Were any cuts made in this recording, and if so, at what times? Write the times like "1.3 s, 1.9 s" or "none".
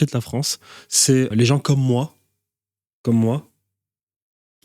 1.3 s